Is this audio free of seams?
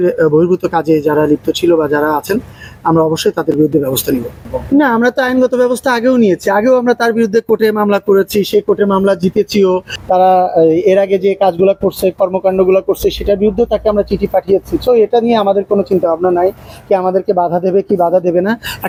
yes; 0 cuts

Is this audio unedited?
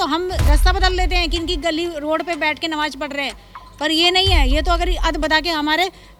yes; 0 cuts

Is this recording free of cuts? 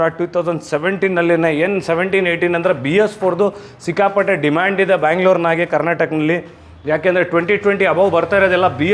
yes; 0 cuts

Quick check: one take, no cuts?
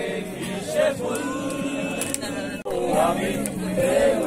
yes; 0 cuts

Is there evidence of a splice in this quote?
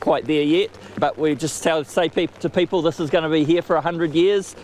yes; 1 cut; at 0.9 s

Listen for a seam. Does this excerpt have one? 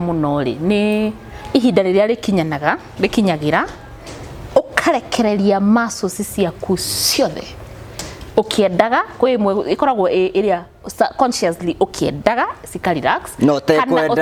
no; 0 cuts

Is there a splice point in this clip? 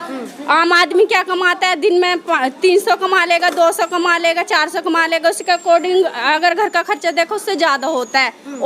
no; 0 cuts

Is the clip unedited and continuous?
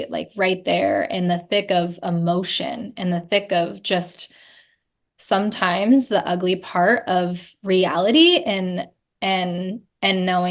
yes; 0 cuts

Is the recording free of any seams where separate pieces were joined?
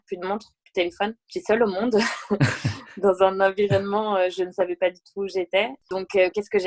yes; 0 cuts

